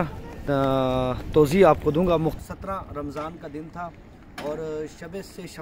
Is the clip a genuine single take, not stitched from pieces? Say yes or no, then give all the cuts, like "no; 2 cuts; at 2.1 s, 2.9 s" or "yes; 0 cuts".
no; 1 cut; at 2.4 s